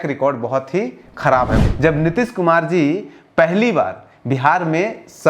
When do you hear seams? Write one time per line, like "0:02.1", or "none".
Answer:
0:01.6